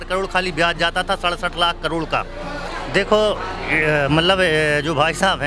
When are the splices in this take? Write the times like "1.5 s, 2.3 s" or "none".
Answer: 2.6 s

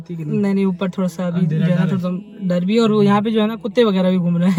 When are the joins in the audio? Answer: none

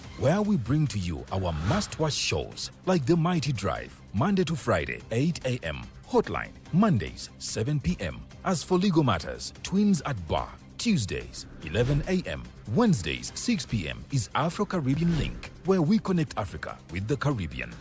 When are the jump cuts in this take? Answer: 15.0 s

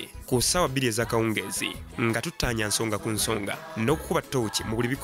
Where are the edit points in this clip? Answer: 4.1 s

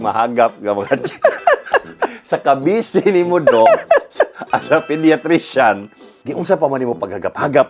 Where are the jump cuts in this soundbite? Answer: none

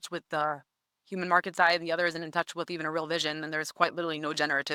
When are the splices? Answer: none

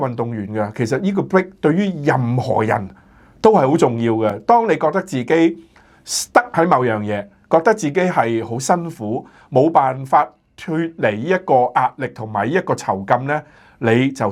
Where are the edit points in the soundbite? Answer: none

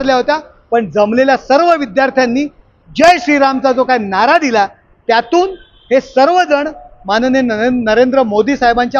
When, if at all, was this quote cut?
none

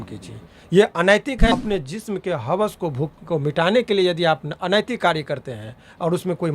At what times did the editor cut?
1.5 s

